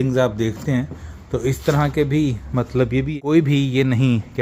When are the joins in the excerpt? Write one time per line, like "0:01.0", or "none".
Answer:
0:03.1